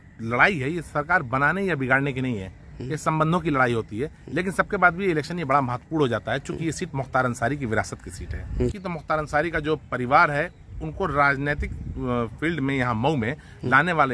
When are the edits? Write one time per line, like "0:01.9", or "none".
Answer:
0:08.8